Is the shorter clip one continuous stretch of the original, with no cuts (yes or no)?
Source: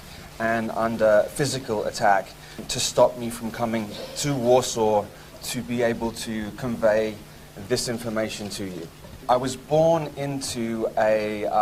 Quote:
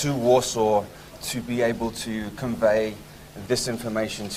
yes